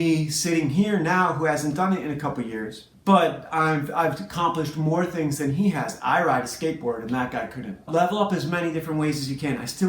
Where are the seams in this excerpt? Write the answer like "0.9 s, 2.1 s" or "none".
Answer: 2.9 s, 7.9 s